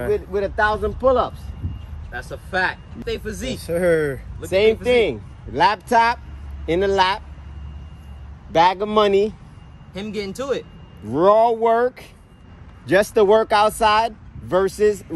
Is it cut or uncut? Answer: cut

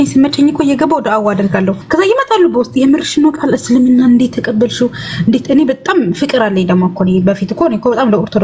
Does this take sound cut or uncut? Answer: cut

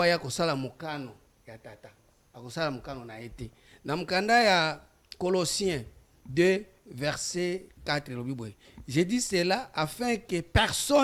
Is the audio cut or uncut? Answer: uncut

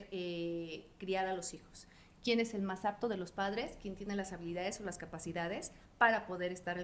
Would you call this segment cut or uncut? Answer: uncut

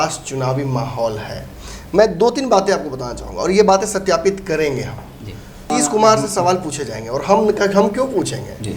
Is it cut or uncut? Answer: cut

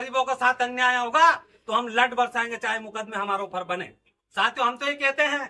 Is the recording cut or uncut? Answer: uncut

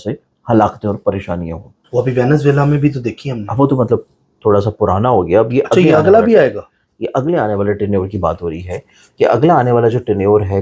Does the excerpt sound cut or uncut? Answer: uncut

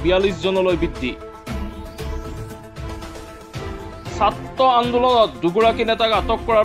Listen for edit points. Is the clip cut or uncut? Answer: cut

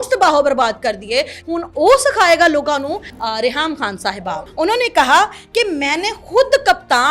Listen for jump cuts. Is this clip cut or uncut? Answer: cut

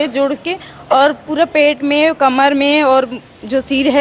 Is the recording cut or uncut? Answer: uncut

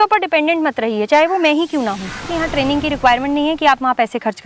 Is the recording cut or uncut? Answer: cut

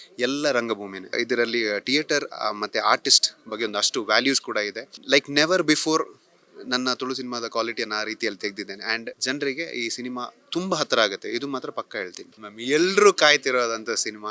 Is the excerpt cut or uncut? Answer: cut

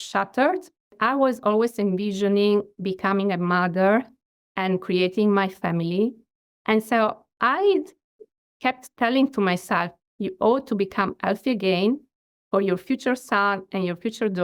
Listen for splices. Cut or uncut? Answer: cut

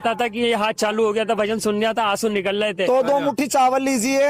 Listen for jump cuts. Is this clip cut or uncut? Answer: cut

